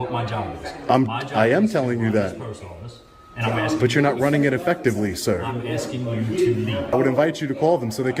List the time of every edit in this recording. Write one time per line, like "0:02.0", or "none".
0:06.9